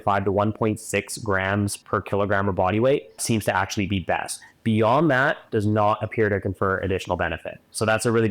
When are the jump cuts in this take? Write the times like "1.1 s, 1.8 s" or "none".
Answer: 3.2 s